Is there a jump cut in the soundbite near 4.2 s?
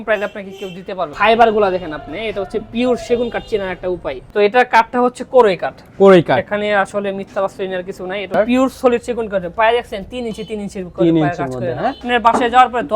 yes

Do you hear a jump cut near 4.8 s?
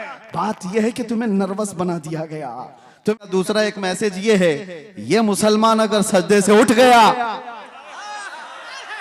no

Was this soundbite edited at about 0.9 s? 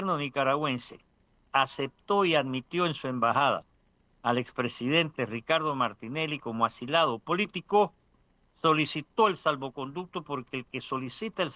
no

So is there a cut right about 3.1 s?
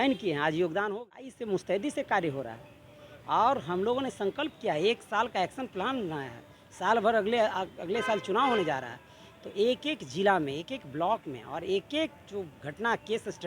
no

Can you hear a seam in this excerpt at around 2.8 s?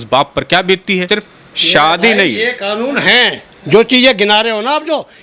no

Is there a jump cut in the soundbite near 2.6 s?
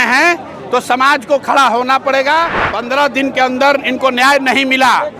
yes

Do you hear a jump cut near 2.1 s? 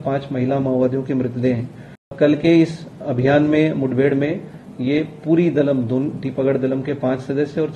yes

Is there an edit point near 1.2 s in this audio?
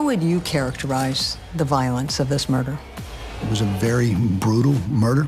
no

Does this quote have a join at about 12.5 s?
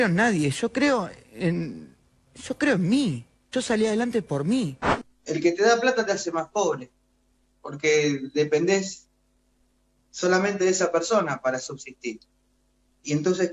no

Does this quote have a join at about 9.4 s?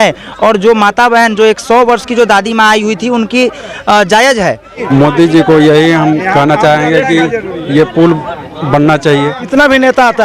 yes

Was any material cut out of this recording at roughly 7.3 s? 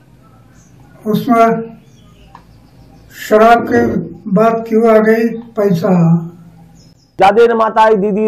yes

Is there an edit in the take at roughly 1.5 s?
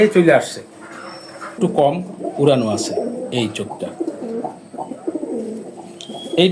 yes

